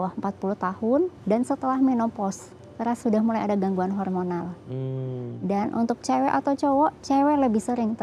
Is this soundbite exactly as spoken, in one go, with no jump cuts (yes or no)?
yes